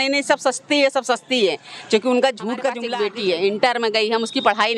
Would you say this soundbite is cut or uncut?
cut